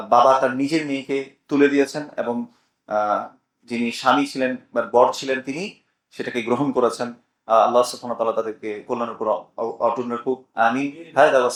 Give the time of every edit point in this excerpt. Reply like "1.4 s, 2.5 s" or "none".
none